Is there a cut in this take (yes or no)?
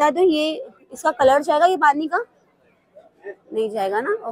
no